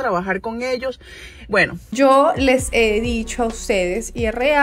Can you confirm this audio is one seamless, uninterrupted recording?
no; 1 cut; at 1.8 s

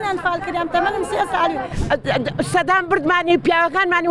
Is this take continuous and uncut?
no; 1 cut; at 1.7 s

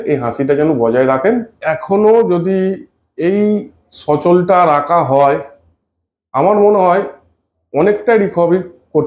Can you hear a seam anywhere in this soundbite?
yes; 1 cut; at 1.6 s

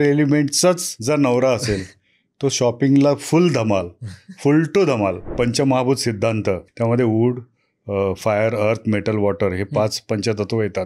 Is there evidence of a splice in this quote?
yes; 3 cuts; at 0.9 s, 5.2 s, 6.7 s

